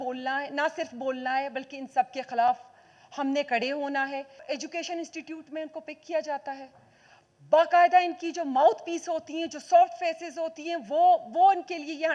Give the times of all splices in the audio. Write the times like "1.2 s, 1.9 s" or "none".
4.4 s